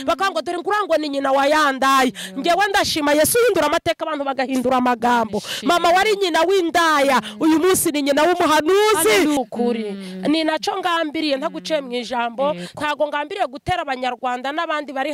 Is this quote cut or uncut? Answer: cut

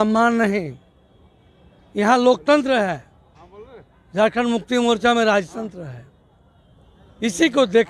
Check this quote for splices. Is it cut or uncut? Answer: uncut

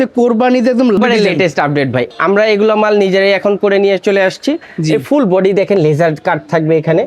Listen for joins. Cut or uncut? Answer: cut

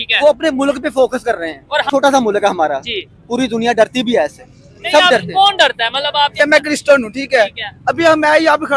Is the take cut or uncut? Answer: cut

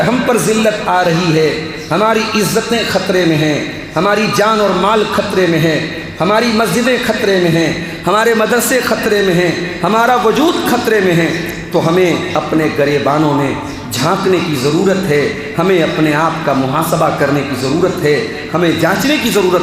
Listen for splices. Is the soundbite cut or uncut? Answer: uncut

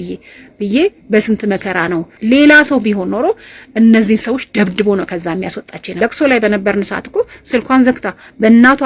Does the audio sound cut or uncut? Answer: cut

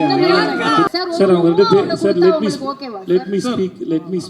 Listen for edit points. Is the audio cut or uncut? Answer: cut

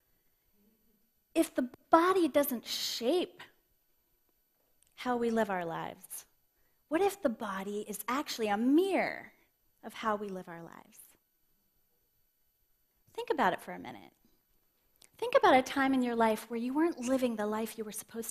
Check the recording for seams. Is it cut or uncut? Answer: cut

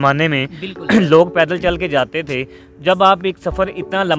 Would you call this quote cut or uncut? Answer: uncut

